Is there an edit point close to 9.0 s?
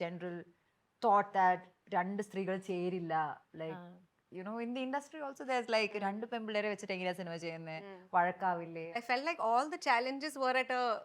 yes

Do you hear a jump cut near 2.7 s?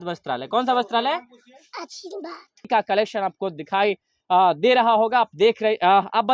yes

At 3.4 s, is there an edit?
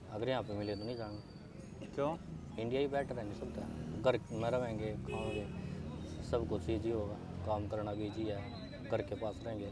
no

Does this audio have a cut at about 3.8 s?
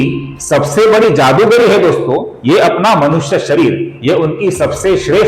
no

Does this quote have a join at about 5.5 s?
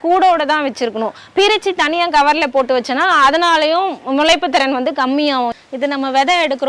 yes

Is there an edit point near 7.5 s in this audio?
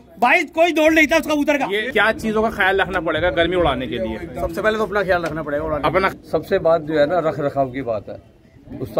no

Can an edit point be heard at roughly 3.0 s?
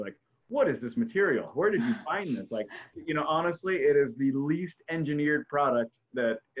yes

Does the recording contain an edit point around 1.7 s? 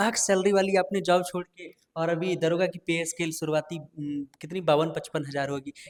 no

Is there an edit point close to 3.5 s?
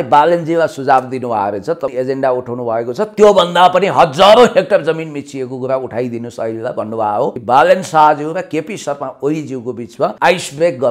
no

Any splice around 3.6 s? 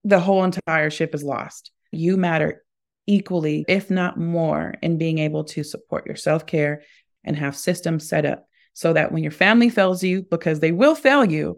yes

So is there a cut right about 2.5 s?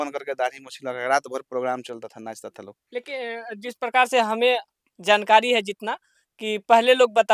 no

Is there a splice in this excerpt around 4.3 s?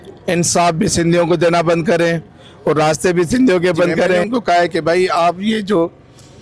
yes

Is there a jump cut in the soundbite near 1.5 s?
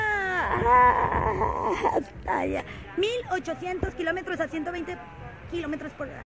yes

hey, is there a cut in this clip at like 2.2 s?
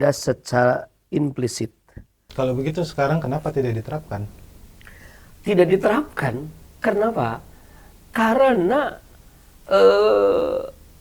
yes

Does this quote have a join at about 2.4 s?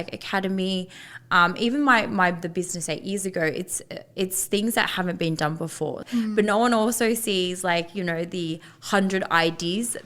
no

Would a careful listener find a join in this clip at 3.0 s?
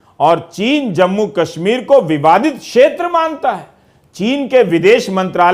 no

